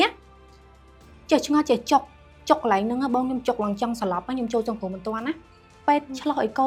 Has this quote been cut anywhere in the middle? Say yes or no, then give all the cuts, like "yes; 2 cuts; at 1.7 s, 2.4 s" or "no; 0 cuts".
no; 0 cuts